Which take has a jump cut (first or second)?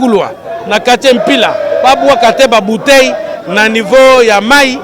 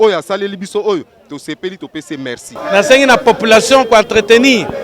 second